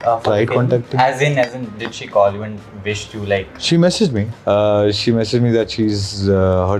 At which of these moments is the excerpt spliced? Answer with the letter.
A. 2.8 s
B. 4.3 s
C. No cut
B